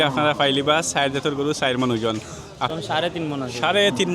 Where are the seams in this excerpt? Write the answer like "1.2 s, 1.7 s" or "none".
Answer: 2.7 s

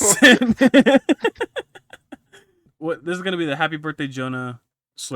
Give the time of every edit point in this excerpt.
2.6 s

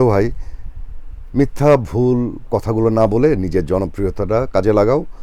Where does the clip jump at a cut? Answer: none

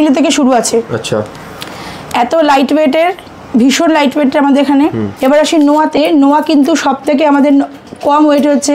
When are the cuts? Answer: 5.1 s

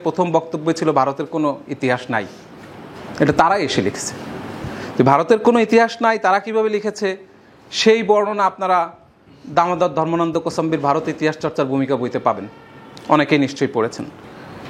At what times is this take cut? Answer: none

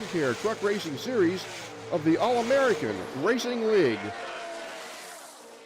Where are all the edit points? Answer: 4.1 s

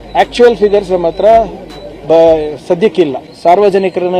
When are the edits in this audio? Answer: 3.2 s

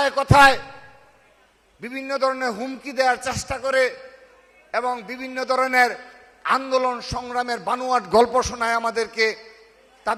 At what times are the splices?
none

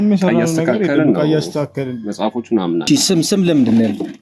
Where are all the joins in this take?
2.8 s

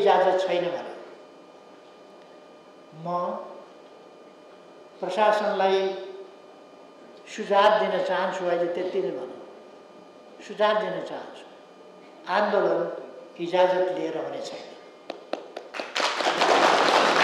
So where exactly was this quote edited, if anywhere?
none

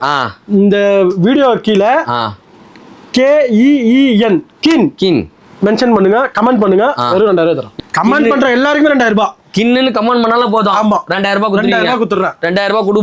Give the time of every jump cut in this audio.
none

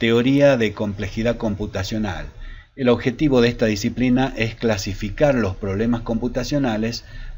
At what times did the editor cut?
5.5 s

